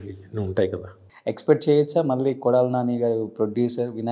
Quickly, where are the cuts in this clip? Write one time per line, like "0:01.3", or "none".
0:01.1